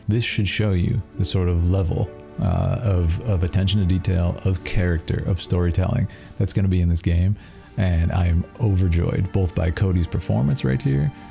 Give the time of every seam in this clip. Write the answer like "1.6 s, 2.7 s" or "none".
none